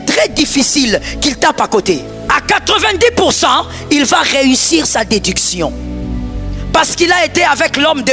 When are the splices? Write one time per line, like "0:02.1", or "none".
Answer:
0:02.1